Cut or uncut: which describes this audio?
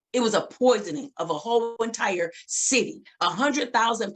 cut